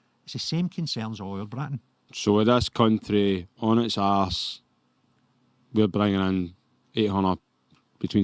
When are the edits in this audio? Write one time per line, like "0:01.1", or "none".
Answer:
0:02.1